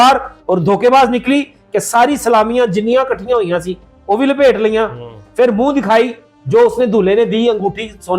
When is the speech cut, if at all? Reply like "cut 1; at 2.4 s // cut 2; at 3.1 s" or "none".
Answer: none

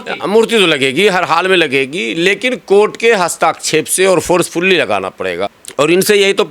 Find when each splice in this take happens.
cut 1; at 5.6 s

